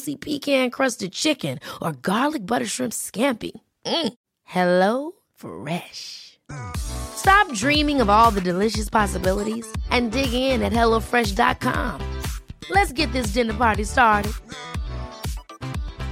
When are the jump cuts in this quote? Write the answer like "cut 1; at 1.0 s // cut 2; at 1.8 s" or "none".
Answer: none